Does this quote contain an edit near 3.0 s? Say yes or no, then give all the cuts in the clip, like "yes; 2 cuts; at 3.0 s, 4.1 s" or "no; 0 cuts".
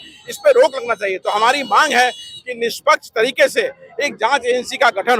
no; 0 cuts